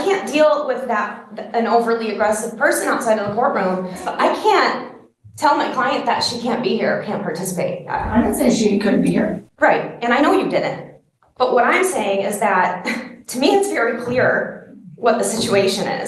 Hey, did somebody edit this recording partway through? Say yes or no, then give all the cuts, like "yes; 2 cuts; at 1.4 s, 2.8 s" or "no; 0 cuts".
yes; 2 cuts; at 4.1 s, 8.1 s